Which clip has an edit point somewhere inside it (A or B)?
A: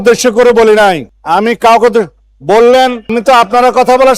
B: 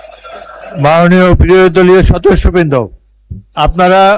A